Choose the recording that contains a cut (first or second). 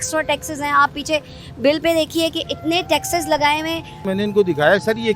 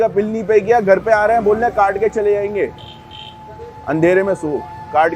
first